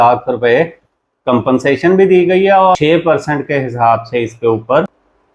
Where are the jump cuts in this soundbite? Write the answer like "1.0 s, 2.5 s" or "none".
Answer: 2.8 s